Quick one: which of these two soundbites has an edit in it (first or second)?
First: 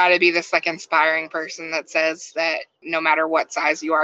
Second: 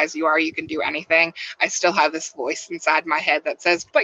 first